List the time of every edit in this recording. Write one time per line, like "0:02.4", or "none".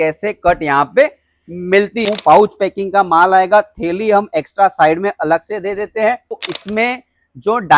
0:02.1
0:06.5